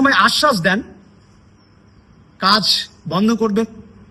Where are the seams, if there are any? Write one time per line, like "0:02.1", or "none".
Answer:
none